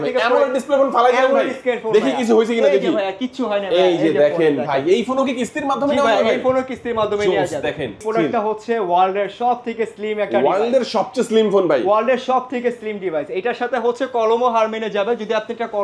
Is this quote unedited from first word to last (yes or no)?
no